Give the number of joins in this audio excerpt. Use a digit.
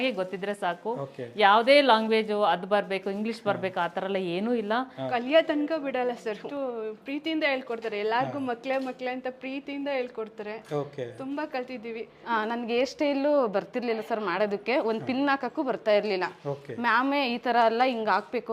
2